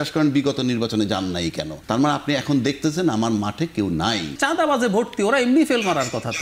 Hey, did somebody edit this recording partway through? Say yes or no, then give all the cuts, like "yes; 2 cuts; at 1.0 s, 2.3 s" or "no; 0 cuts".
yes; 2 cuts; at 1.7 s, 4.4 s